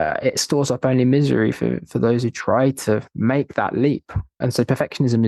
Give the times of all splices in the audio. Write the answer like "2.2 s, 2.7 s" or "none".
4.4 s